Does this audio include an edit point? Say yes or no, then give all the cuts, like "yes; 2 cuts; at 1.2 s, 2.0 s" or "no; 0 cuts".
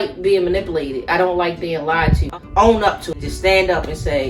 yes; 2 cuts; at 2.3 s, 3.1 s